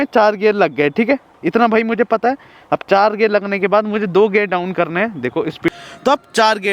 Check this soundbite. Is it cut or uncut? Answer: cut